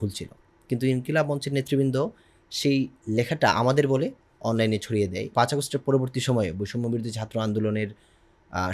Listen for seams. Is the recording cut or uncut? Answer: cut